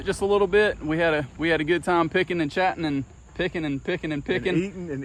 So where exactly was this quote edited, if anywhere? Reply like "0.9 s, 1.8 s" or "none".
none

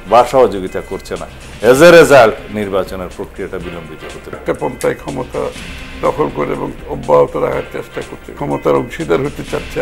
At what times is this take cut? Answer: 4.4 s, 8.3 s

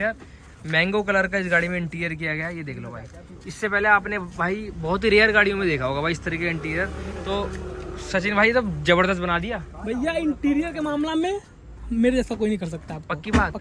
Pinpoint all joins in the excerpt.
none

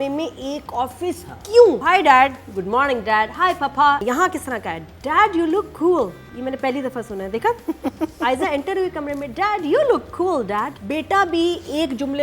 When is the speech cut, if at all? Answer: 1.8 s, 4.0 s, 6.2 s, 10.8 s

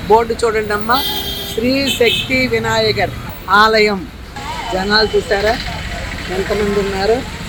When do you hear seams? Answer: none

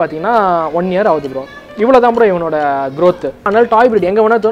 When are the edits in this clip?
3.5 s

